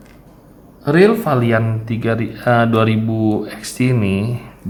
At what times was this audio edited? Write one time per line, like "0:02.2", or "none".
none

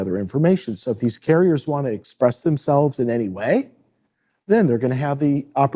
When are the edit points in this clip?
none

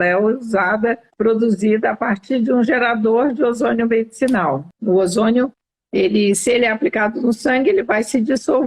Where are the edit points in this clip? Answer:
0:01.1
0:04.7

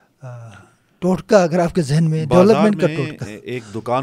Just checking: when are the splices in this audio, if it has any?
none

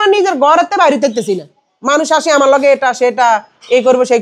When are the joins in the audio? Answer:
none

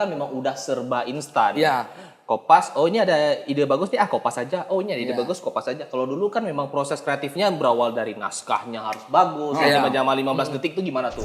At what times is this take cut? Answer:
none

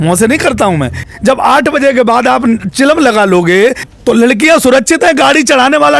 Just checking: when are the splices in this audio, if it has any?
0:01.0
0:03.8

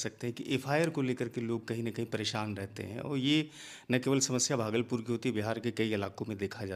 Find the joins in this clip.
none

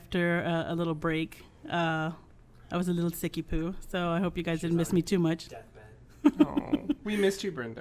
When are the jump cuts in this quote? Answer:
none

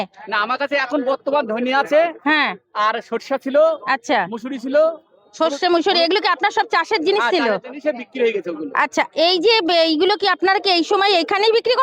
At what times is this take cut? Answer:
none

